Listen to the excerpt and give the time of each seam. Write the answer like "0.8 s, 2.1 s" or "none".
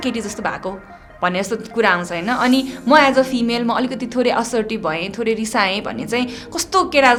none